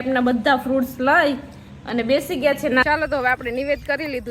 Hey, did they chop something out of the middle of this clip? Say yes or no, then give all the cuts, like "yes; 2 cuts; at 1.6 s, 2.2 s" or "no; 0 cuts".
yes; 1 cut; at 2.8 s